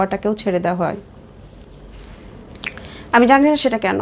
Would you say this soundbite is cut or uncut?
uncut